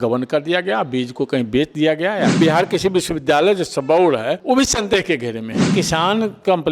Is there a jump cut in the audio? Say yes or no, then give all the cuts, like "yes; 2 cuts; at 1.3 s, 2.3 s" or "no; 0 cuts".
yes; 3 cuts; at 2.4 s, 4.4 s, 5.7 s